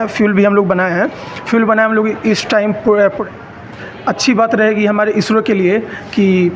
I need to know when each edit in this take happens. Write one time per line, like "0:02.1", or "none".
0:03.2